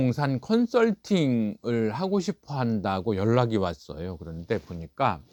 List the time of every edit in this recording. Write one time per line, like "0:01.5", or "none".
none